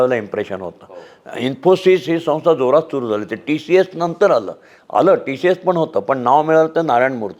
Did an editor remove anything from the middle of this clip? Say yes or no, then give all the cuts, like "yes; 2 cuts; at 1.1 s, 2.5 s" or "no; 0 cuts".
no; 0 cuts